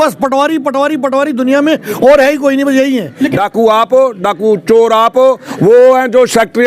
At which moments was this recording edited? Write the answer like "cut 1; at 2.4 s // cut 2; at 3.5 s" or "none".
cut 1; at 3.3 s